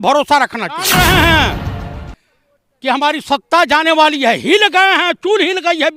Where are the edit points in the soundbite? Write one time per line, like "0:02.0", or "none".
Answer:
0:00.9